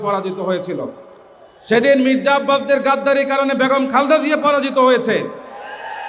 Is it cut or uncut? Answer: uncut